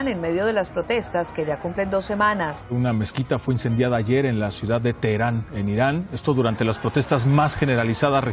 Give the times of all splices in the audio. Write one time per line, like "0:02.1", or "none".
0:02.6